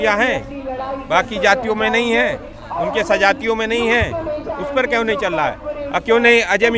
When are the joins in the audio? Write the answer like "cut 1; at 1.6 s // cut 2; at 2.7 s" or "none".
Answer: none